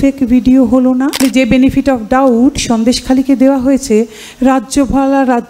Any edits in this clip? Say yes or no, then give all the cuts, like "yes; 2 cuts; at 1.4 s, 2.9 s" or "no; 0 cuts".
yes; 1 cut; at 1.2 s